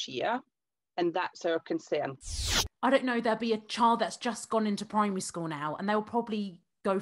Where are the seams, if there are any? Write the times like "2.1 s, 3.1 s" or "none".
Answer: 2.2 s